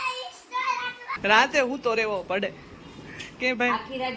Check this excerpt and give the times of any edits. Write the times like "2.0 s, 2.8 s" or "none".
1.1 s